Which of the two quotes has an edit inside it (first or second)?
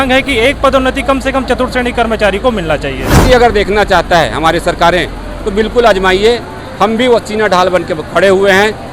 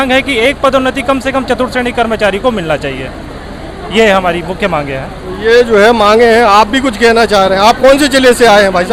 first